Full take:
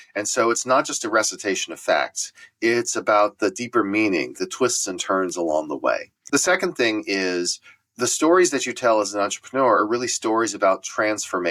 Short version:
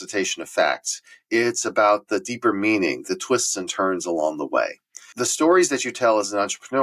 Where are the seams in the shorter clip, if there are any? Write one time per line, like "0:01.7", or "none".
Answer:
0:04.8